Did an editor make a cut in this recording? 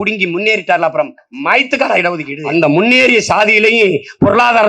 yes; 1 cut; at 2.4 s

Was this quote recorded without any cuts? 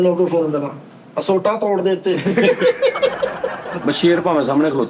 no; 1 cut; at 3.7 s

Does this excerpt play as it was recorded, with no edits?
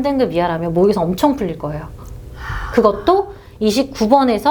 yes; 0 cuts

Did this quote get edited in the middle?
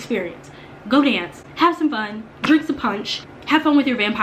yes; 1 cut; at 3.3 s

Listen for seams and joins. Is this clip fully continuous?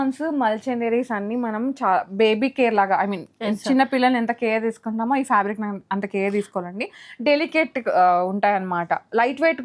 yes; 0 cuts

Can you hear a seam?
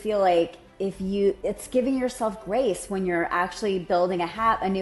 yes; 1 cut; at 1.1 s

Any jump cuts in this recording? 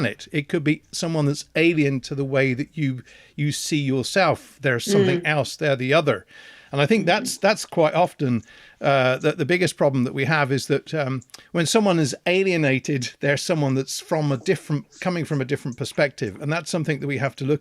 no; 0 cuts

